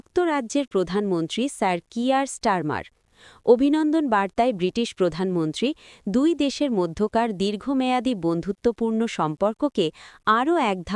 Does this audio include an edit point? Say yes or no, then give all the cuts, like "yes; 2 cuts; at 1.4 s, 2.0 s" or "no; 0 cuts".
no; 0 cuts